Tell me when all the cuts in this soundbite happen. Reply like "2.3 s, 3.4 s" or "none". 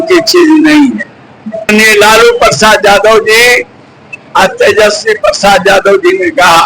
1.7 s